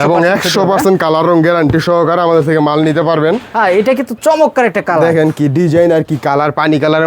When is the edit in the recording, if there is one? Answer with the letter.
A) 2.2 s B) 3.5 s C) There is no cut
C